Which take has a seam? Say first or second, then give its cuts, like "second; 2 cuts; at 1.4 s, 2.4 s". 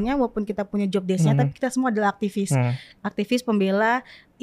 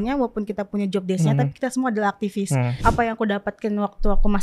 second; 1 cut; at 2.7 s